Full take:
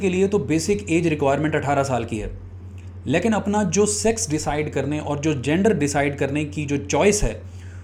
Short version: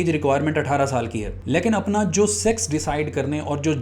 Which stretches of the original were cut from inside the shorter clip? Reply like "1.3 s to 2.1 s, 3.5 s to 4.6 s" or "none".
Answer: 2.3 s to 2.9 s